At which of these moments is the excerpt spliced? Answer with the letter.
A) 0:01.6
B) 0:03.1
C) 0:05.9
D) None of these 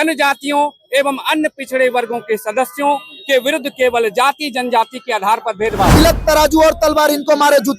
C